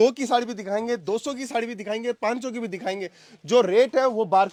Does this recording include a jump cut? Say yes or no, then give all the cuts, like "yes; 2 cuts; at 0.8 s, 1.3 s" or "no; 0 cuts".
no; 0 cuts